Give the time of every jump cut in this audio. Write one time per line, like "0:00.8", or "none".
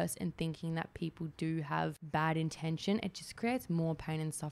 0:02.0

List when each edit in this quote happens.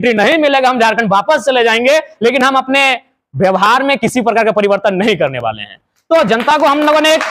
none

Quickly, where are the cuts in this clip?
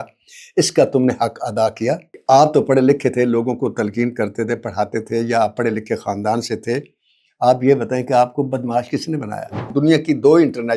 0:02.1
0:09.6

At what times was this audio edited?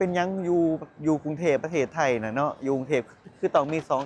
none

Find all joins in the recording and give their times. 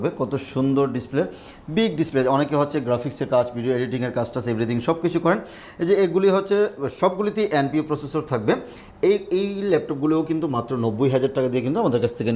none

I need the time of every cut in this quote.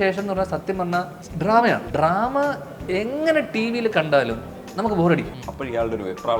0:01.2
0:01.9
0:05.4

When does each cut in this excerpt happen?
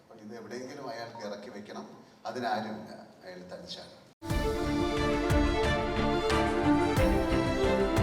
0:04.1

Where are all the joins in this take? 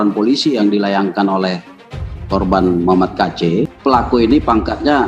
0:03.7

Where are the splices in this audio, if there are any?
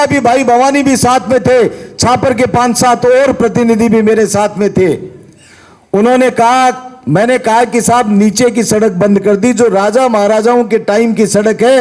none

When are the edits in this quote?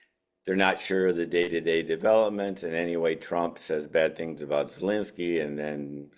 none

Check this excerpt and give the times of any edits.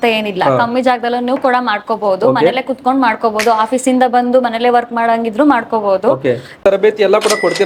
0:06.6

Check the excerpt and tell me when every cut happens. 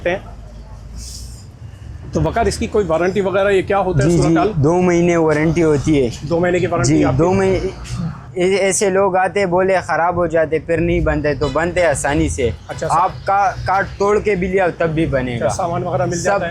none

